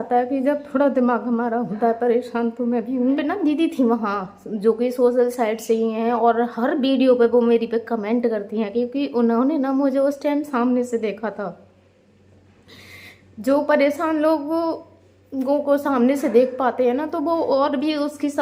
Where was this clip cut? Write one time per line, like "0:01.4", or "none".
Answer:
0:03.2